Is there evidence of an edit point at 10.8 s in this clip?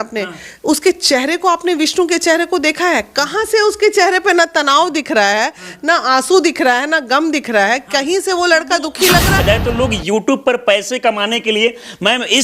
no; 1 cut; at 9.4 s

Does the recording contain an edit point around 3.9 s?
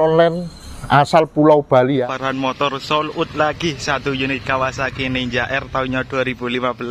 no; 1 cut; at 2.2 s

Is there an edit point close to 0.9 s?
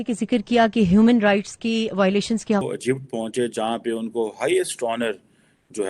no; 1 cut; at 2.6 s

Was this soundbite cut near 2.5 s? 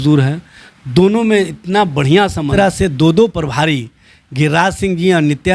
yes; 1 cut; at 2.5 s

